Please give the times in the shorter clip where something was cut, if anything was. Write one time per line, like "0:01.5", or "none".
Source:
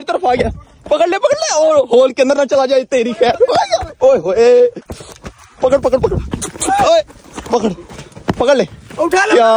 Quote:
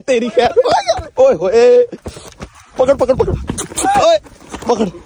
none